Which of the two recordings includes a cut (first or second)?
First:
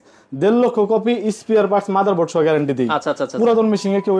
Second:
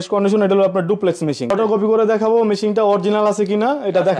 second